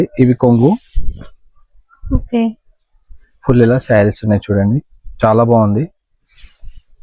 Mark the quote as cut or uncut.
uncut